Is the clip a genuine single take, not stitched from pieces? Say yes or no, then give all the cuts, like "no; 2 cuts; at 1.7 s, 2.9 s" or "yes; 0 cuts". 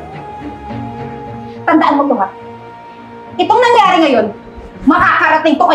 yes; 0 cuts